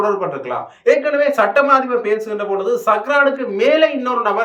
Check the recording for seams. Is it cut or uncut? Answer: uncut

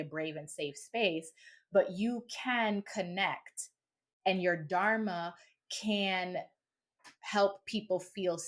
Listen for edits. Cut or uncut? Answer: uncut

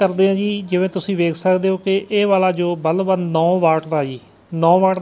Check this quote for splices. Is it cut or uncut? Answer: uncut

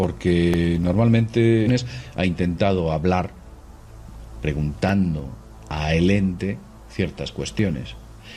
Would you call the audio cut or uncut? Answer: uncut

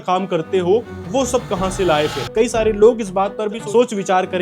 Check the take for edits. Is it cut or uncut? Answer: cut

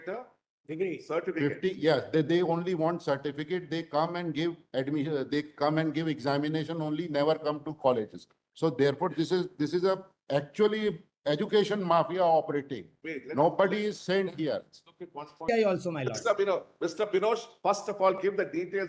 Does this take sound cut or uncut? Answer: cut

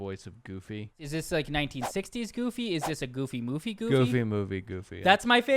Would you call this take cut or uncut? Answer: cut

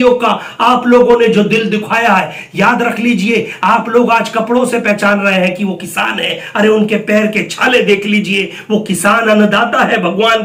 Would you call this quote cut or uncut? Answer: uncut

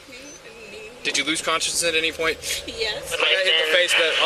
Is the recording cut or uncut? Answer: cut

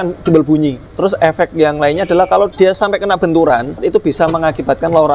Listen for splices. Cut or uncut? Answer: cut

